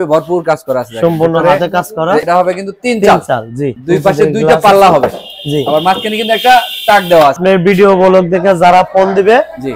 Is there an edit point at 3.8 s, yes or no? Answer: yes